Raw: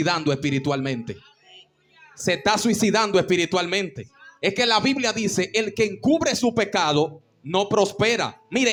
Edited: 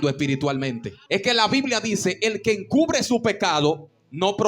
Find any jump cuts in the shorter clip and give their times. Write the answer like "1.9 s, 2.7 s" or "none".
0.9 s